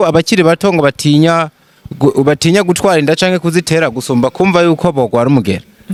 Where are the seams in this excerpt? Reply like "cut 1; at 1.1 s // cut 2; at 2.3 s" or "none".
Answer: none